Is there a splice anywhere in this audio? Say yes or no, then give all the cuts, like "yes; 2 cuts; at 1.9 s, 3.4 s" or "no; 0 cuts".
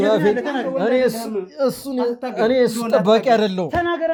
no; 0 cuts